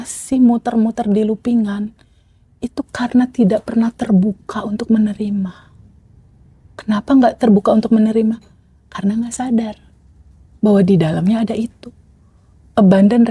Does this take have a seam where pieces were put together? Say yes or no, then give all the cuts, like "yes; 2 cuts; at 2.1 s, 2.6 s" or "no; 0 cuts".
no; 0 cuts